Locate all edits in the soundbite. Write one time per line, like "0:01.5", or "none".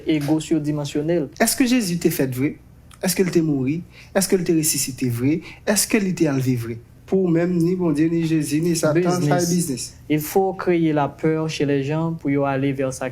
0:01.3
0:06.9